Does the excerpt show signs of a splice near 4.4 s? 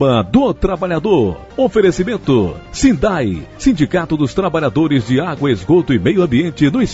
no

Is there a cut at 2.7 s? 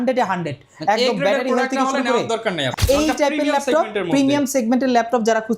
yes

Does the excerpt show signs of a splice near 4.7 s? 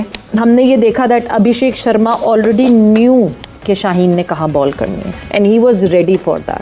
no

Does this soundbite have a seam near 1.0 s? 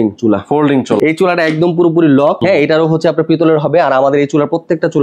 yes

